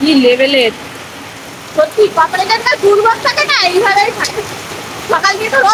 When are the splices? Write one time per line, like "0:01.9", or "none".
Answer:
none